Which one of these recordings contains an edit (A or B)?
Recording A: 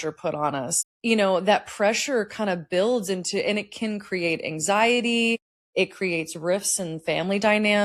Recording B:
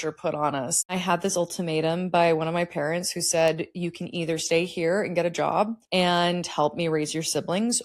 B